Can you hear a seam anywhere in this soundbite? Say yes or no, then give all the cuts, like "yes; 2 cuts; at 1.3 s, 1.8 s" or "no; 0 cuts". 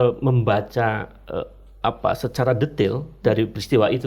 no; 0 cuts